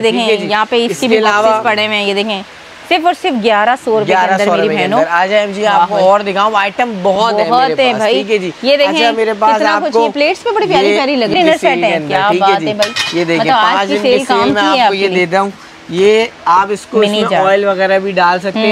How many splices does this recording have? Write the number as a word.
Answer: zero